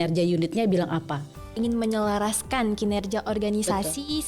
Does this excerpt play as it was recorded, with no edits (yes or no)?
no